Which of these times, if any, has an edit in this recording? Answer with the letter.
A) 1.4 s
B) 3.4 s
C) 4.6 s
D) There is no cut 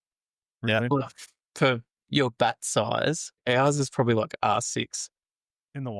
B